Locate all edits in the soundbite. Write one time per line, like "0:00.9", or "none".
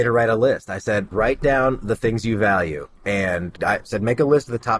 0:01.1